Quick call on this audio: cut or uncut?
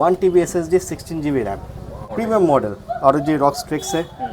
cut